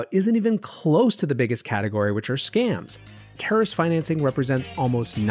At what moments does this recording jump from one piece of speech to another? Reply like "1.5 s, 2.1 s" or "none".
3.3 s